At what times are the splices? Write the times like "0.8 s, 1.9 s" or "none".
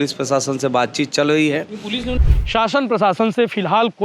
2.2 s